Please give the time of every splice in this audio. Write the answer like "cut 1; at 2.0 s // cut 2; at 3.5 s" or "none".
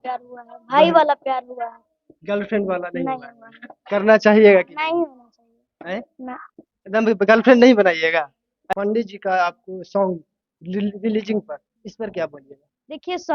cut 1; at 8.6 s